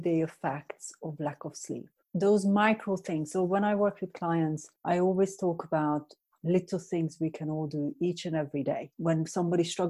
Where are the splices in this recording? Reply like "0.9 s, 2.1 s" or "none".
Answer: 1.9 s, 4.7 s, 8.9 s

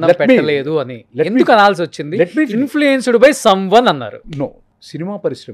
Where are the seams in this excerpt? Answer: none

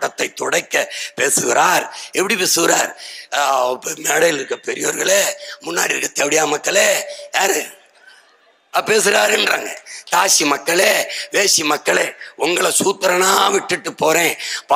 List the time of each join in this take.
none

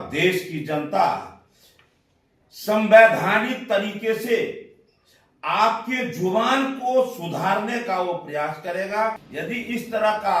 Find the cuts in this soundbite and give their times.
9.3 s

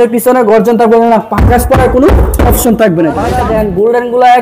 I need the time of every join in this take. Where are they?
3.3 s

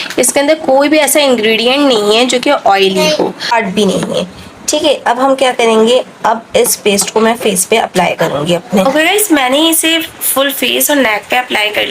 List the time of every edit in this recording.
3.4 s

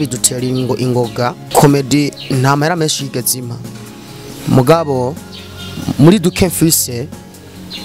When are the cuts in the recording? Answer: 1.4 s

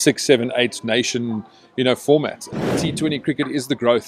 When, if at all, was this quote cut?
2.7 s

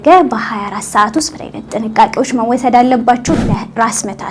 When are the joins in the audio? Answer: 3.2 s

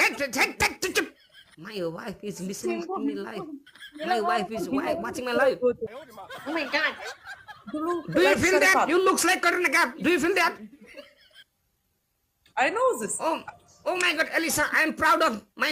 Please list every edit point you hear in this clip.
5.9 s

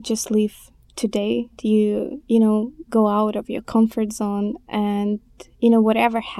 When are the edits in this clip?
1.6 s

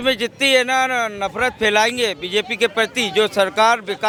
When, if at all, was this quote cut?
none

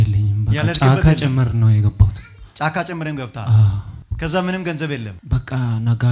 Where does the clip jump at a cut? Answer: none

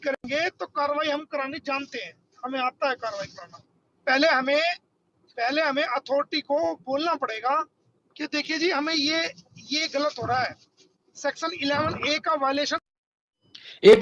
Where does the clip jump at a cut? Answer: none

